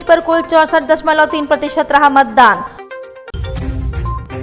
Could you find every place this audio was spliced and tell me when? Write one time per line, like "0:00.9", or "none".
none